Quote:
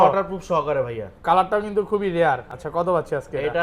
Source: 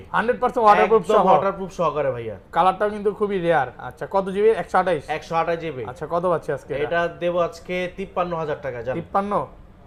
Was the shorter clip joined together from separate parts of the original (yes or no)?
yes